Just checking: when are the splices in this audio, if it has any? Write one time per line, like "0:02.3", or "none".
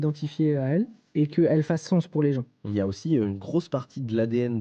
0:01.0
0:02.7